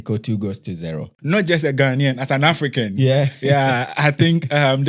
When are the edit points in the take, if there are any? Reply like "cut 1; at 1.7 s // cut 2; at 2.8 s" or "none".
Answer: cut 1; at 1.1 s